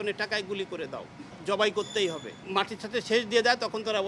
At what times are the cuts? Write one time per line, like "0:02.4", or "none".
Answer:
0:01.3
0:02.4